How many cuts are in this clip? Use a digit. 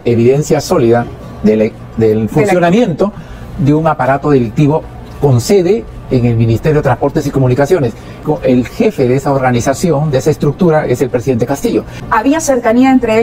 2